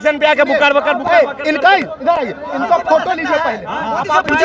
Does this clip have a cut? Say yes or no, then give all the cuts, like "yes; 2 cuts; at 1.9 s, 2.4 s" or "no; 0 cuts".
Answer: no; 0 cuts